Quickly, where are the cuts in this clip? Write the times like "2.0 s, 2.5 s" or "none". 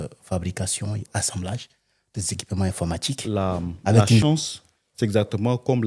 4.2 s